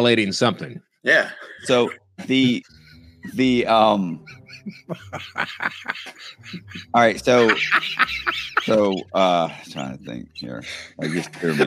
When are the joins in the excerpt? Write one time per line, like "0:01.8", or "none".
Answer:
none